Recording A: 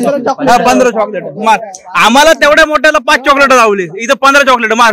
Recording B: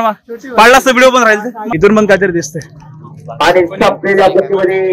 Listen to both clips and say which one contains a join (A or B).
B